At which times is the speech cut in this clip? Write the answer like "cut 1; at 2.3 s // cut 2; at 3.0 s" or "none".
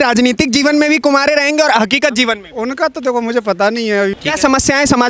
cut 1; at 4.1 s